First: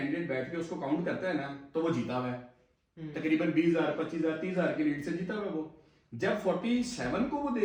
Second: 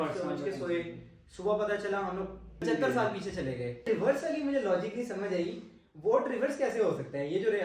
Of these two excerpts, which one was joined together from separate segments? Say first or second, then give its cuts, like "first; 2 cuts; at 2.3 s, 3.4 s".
second; 2 cuts; at 2.6 s, 3.9 s